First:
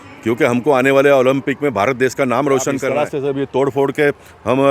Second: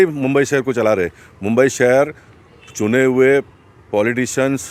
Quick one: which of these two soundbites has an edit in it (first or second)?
first